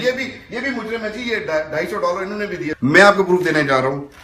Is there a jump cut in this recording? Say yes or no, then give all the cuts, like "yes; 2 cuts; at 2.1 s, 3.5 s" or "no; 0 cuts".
yes; 1 cut; at 2.7 s